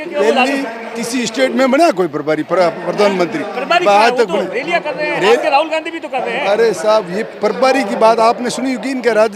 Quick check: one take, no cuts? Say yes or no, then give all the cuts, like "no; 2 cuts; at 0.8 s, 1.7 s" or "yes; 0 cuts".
yes; 0 cuts